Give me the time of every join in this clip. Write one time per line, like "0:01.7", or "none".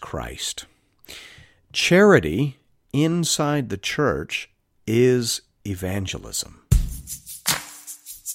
0:06.5